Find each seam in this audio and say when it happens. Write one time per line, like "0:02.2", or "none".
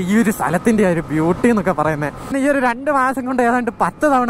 0:02.3